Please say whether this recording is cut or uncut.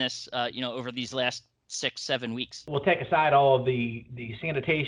cut